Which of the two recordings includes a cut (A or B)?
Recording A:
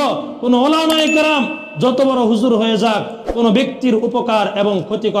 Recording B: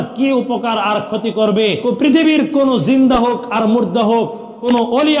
B